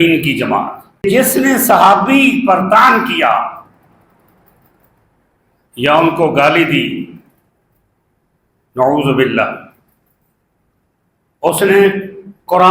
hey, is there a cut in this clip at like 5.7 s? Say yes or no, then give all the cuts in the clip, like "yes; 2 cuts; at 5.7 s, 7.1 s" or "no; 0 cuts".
no; 1 cut; at 1.0 s